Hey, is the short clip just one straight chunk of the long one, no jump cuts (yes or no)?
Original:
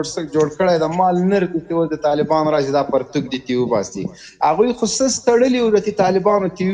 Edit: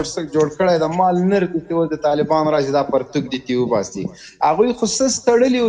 yes